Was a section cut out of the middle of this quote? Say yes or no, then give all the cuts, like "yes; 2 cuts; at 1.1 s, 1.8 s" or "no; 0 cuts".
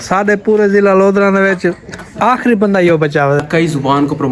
yes; 1 cut; at 3.4 s